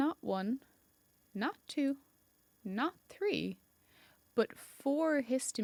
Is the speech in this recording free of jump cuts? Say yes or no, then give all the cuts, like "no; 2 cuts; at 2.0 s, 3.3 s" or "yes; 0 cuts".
yes; 0 cuts